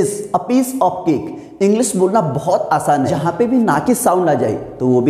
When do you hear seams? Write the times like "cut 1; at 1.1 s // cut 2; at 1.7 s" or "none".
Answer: cut 1; at 3.2 s

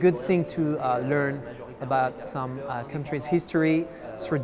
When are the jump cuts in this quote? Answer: none

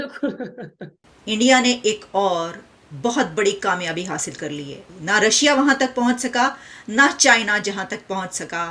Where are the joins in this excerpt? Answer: cut 1; at 1.1 s // cut 2; at 4.8 s

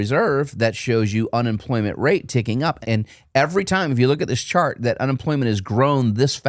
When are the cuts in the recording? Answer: cut 1; at 2.8 s

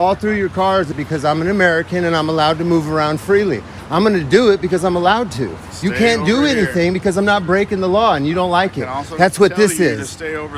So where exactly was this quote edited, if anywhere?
cut 1; at 1.0 s

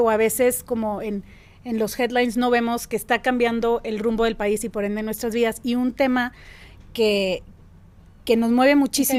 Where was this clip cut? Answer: none

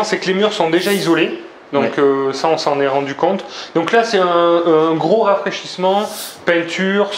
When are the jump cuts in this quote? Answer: none

